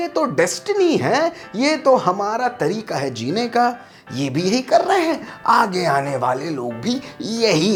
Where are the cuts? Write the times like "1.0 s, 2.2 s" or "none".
none